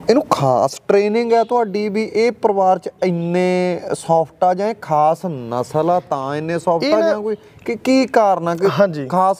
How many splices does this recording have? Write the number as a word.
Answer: zero